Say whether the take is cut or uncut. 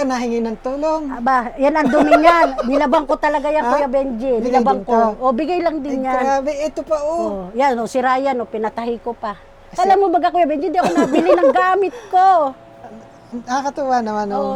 uncut